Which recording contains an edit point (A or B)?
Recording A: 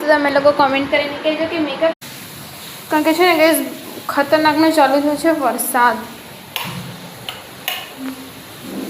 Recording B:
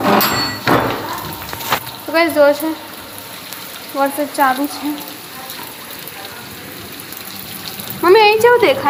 A